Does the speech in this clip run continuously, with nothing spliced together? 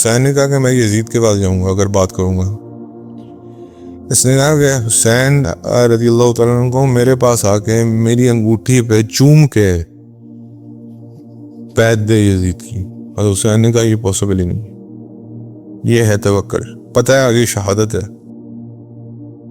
no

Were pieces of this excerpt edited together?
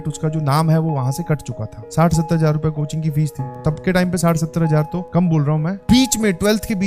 yes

